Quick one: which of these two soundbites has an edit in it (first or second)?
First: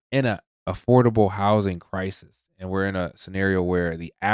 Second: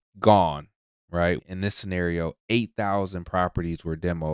second